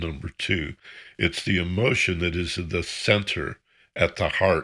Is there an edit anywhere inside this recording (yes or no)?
no